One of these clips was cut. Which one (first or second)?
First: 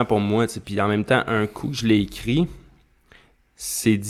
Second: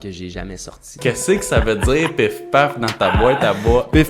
second